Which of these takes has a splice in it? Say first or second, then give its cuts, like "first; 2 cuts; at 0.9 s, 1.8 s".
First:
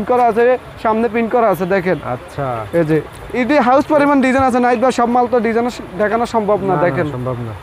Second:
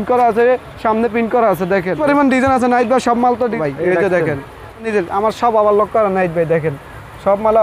second; 3 cuts; at 2.0 s, 3.6 s, 4.9 s